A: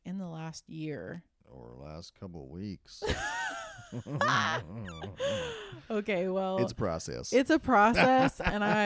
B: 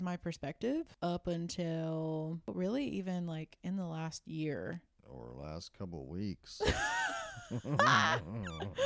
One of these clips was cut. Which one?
B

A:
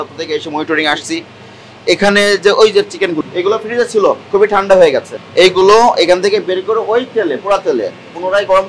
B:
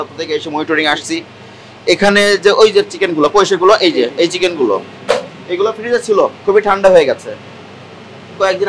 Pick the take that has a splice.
A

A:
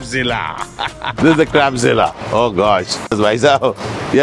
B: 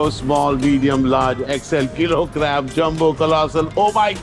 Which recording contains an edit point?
A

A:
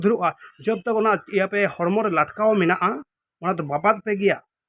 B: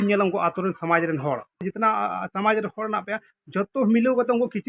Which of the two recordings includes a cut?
B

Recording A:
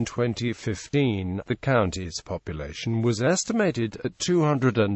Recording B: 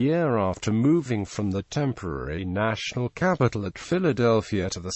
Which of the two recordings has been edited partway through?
B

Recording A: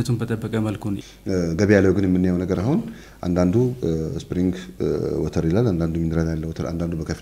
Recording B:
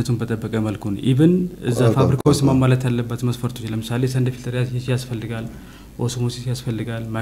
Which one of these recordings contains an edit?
A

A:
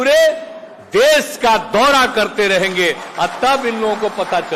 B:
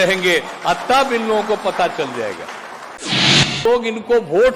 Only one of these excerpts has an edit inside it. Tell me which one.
B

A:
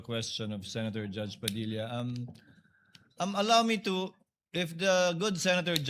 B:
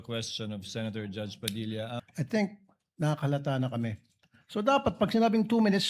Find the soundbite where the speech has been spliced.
B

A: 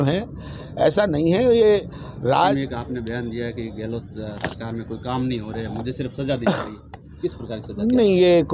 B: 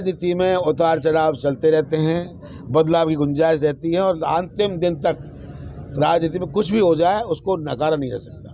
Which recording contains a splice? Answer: A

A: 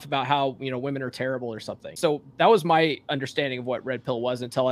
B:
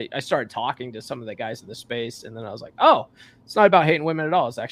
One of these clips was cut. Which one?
A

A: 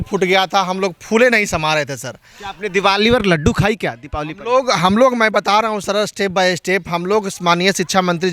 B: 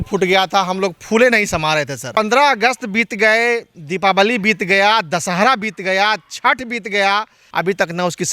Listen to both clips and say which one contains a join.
B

